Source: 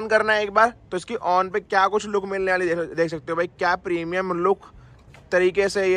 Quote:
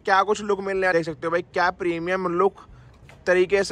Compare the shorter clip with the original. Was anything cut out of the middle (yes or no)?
yes